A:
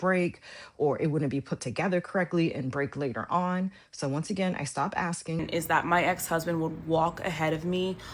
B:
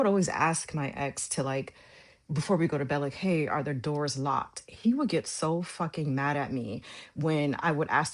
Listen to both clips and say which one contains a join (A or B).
A